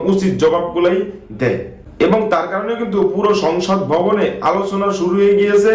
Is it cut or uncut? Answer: cut